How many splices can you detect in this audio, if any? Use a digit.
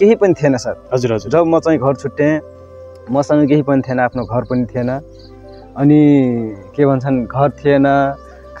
0